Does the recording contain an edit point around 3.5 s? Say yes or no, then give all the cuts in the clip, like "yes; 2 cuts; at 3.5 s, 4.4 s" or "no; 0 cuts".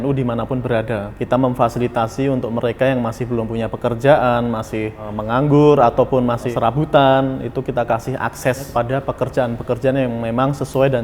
no; 4 cuts; at 1.1 s, 5.1 s, 6.5 s, 8.7 s